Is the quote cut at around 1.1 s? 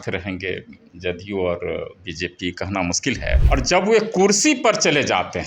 no; 1 cut; at 3.4 s

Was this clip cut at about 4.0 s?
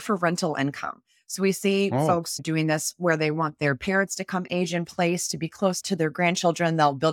no; 1 cut; at 5.8 s

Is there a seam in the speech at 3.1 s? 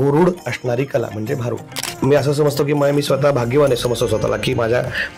no; 1 cut; at 1.9 s

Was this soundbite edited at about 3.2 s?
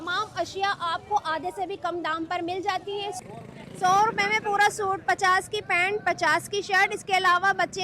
yes; 1 cut; at 3.2 s

